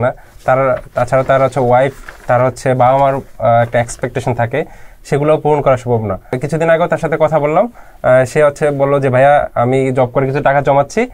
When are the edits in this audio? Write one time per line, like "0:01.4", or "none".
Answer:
0:06.4